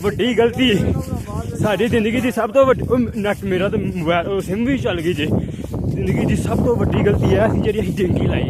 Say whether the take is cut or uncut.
uncut